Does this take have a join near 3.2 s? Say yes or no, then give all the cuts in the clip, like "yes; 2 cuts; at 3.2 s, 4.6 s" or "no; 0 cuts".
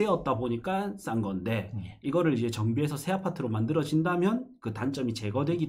no; 0 cuts